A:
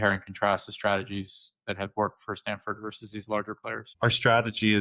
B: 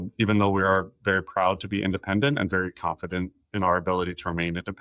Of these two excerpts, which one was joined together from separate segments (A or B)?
A